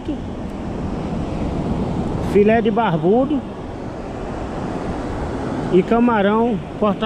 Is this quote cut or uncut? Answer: uncut